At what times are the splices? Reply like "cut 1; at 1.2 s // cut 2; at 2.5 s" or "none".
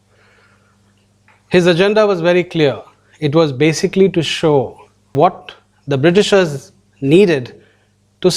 cut 1; at 5.1 s